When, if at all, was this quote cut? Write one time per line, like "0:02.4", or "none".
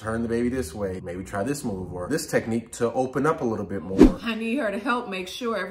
0:01.0
0:02.0
0:04.0